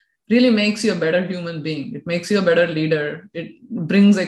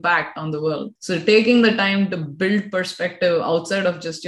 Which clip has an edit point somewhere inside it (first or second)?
second